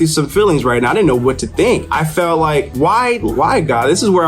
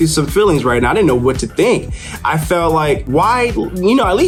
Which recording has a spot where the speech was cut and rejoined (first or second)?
first